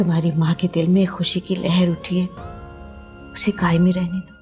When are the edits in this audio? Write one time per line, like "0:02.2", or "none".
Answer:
none